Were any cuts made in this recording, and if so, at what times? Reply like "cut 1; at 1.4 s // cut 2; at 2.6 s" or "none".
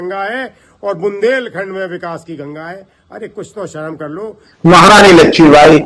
cut 1; at 4.5 s